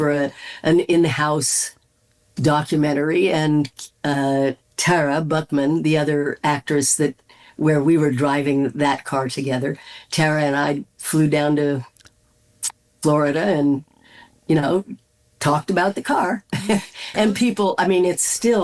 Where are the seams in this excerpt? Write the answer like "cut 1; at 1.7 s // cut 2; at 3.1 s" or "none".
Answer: none